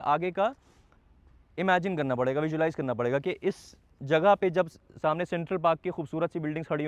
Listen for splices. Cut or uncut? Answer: uncut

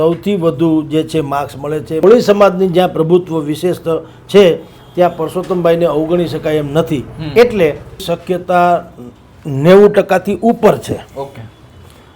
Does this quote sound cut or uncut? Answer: cut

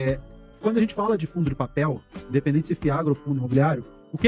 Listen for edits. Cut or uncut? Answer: uncut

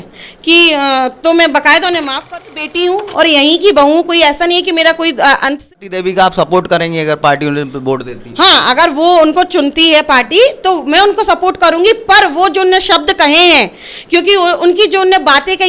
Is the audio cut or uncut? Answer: cut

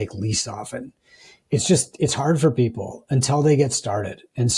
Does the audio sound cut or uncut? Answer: uncut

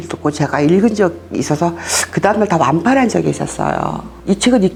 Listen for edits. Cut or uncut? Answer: uncut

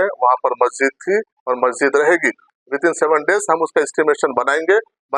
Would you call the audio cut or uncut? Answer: cut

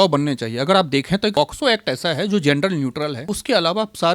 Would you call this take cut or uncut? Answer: cut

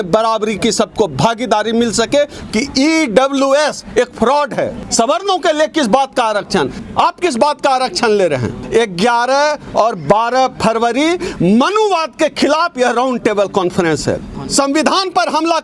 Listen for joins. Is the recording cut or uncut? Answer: cut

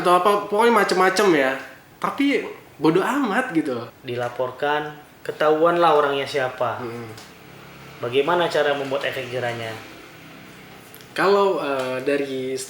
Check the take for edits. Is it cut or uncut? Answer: cut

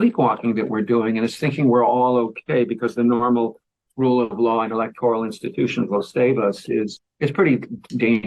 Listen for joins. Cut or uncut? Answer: uncut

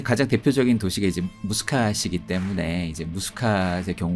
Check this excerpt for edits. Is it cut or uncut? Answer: uncut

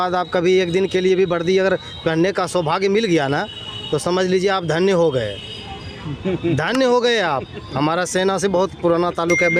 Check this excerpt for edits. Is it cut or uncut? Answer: uncut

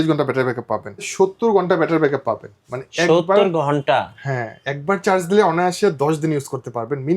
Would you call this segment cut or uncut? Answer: cut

